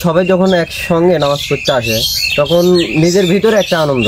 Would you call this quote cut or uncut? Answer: uncut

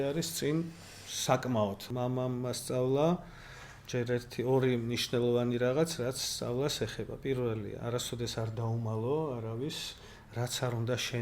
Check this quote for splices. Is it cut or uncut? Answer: cut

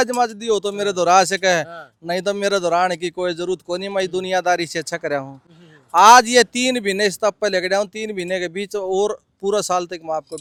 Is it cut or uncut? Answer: uncut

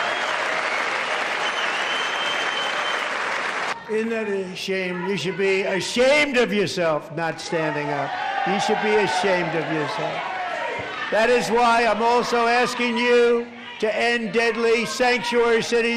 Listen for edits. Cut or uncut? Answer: cut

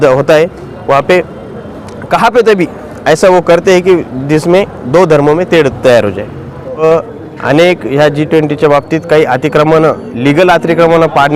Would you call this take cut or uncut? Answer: cut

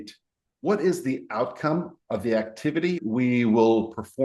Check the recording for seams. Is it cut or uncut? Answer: cut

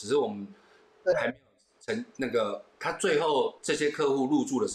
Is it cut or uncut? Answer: cut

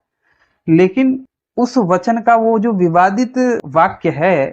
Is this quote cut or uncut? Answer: cut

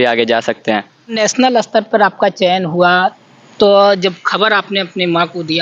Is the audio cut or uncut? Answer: cut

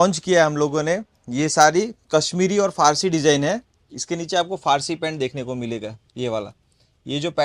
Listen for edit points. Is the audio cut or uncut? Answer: uncut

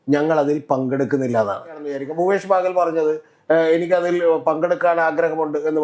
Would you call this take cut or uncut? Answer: cut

